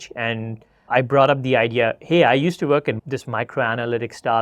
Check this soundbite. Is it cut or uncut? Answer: cut